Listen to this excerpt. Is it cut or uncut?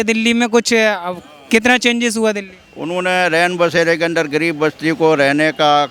uncut